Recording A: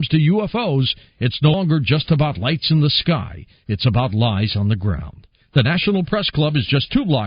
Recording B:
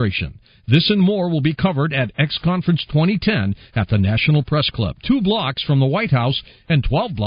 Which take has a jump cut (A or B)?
A